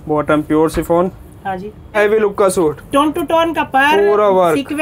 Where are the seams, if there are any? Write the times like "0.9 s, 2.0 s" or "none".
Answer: 2.0 s